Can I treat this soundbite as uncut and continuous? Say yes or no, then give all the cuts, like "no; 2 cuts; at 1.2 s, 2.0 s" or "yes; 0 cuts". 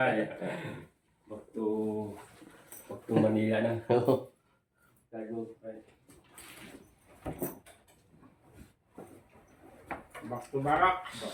yes; 0 cuts